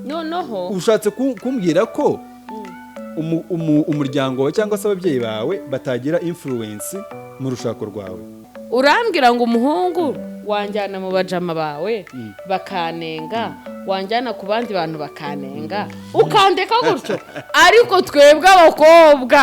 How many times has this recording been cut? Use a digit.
1